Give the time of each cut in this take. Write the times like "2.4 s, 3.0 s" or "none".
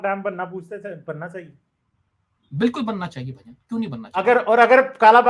none